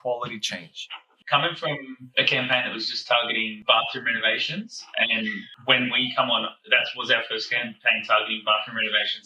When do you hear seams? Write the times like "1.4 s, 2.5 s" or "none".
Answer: 1.1 s, 2.0 s, 3.5 s